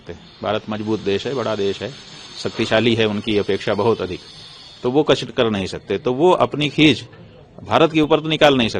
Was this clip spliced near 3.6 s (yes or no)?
no